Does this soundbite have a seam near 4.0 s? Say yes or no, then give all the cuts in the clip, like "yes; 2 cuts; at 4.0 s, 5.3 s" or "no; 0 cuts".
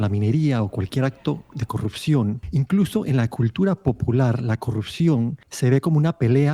no; 2 cuts; at 2.4 s, 5.4 s